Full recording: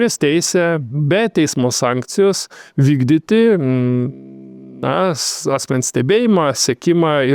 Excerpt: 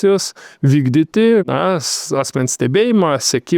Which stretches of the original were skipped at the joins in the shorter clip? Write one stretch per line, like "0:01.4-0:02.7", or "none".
0:03.6-0:04.8